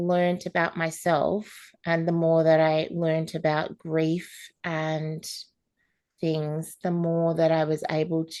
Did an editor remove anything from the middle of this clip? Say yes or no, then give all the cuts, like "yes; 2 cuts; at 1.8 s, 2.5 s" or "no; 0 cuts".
no; 0 cuts